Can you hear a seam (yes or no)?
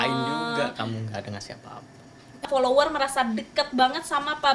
yes